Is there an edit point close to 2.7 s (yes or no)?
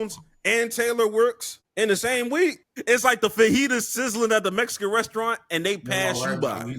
yes